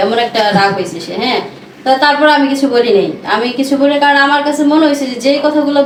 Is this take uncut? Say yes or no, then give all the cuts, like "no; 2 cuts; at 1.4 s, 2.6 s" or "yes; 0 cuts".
yes; 0 cuts